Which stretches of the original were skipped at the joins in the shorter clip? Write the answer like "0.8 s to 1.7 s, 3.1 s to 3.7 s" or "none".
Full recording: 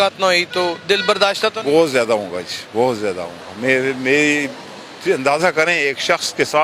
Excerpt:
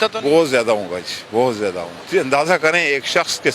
3.3 s to 4.9 s